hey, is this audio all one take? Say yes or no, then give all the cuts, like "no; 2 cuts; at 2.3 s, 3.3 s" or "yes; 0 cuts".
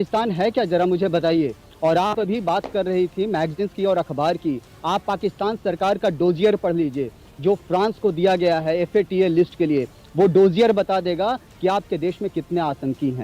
yes; 0 cuts